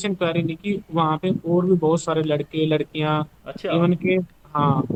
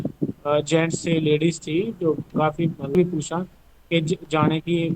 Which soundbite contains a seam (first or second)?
second